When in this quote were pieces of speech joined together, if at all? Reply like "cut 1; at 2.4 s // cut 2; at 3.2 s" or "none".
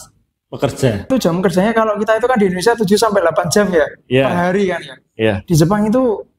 cut 1; at 1.1 s